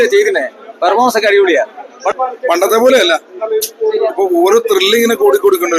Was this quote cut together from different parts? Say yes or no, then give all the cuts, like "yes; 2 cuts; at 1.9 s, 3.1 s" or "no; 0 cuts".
yes; 1 cut; at 2.1 s